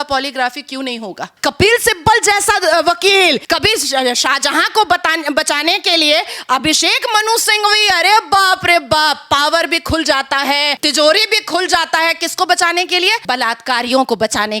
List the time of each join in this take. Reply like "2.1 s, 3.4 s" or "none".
1.3 s, 3.4 s, 10.8 s, 13.2 s